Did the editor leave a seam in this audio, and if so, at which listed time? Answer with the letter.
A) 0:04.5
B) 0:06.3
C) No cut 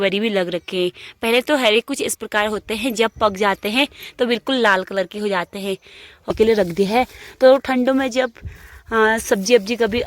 B